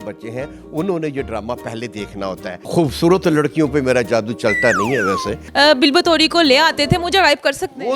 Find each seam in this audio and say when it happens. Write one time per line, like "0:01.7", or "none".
0:02.7
0:05.3